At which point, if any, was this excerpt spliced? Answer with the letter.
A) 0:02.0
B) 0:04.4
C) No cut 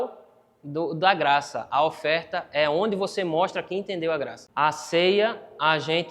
B